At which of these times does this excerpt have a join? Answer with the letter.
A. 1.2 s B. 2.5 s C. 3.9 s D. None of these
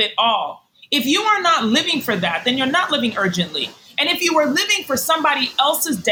D